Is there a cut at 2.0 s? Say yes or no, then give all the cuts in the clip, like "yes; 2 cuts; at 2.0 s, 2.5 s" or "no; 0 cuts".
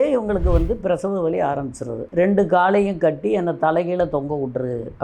yes; 1 cut; at 2.0 s